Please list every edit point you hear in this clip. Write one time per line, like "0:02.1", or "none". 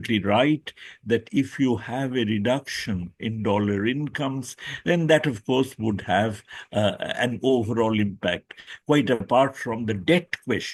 none